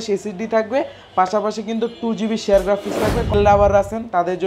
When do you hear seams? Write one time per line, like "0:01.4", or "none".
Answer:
0:03.3